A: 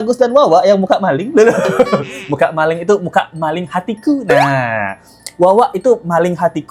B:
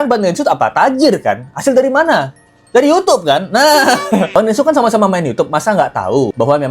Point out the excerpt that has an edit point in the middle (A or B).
B